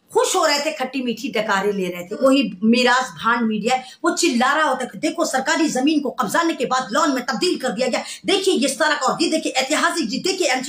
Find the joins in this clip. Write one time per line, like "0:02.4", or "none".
0:02.2